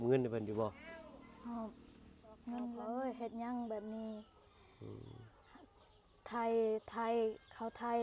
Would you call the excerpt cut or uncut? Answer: cut